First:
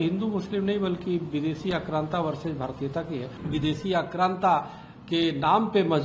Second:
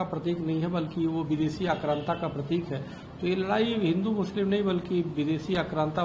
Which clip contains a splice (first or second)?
first